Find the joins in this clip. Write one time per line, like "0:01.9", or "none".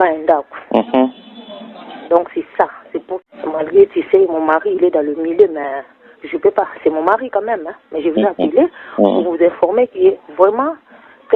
0:03.1